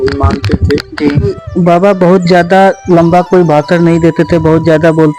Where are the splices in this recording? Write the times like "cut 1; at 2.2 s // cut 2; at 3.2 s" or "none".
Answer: cut 1; at 1.4 s

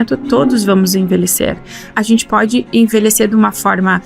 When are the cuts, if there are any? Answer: cut 1; at 1.9 s

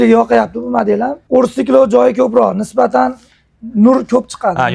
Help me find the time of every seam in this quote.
cut 1; at 1.2 s

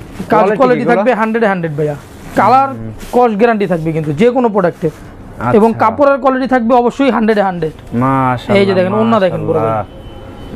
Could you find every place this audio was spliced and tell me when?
none

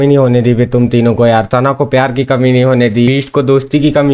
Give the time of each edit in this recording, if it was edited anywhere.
cut 1; at 1.5 s // cut 2; at 3.1 s

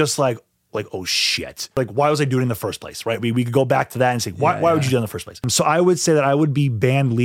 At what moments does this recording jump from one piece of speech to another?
cut 1; at 1.8 s // cut 2; at 5.5 s

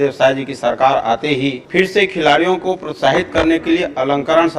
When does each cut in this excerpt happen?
cut 1; at 1.6 s

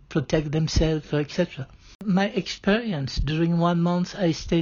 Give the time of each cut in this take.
cut 1; at 2.0 s

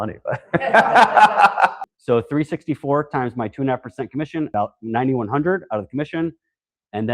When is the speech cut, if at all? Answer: cut 1; at 1.8 s // cut 2; at 4.5 s

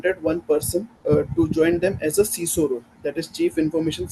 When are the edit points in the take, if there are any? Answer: cut 1; at 0.9 s

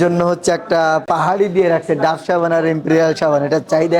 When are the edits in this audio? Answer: cut 1; at 1.0 s

